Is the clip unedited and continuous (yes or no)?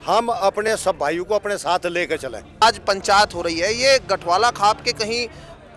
no